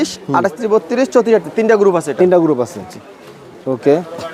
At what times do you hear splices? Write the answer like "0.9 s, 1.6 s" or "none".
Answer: none